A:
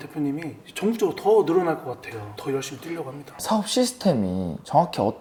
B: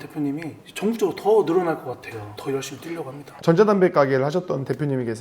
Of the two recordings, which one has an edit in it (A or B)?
B